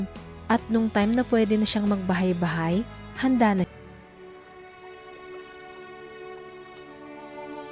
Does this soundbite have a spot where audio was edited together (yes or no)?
yes